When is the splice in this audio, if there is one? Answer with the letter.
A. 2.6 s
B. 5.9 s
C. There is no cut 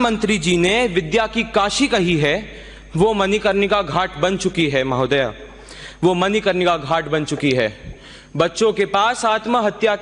C